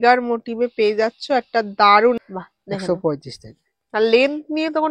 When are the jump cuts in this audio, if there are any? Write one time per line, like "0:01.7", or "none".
0:02.2